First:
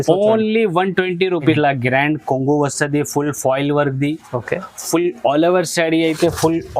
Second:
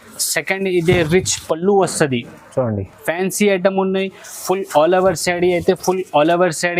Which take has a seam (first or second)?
first